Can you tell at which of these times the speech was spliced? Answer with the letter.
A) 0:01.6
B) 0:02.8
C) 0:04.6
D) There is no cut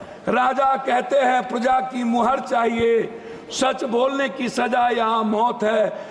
D